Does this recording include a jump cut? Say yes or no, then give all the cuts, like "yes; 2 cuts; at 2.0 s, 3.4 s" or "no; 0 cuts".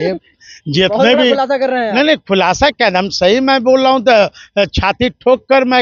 no; 0 cuts